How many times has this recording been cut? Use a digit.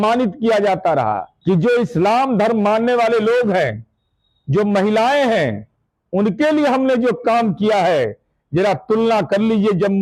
1